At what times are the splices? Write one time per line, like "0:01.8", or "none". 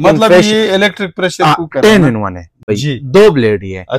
0:02.7